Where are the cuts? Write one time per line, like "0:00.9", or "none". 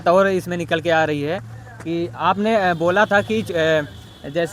none